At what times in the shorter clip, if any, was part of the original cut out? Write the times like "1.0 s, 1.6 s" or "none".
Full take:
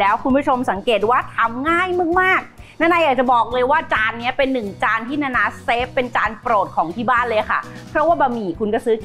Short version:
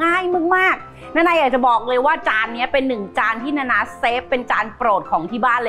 none